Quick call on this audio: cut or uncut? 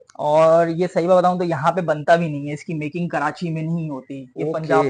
uncut